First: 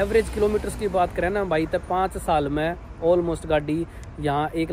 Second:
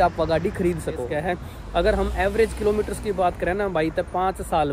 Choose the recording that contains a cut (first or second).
second